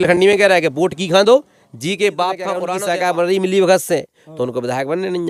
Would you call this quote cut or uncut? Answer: cut